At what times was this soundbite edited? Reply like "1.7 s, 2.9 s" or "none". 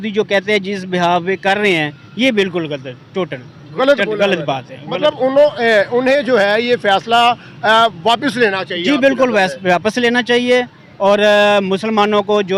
none